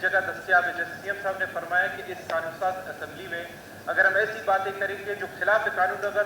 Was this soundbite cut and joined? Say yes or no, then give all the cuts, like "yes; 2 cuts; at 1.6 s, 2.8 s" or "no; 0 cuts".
no; 0 cuts